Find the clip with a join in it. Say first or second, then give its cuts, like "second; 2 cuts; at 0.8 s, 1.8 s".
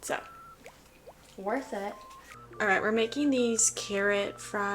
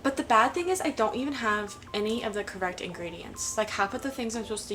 first; 1 cut; at 2.2 s